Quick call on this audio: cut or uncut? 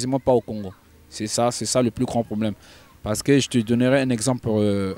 uncut